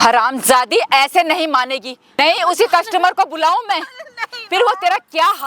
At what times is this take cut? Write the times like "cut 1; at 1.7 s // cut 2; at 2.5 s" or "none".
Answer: cut 1; at 2.0 s